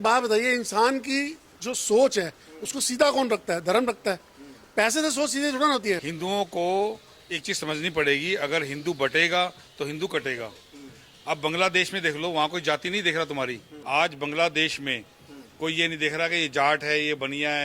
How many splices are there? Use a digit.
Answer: 2